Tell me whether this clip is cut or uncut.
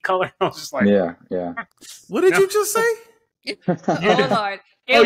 uncut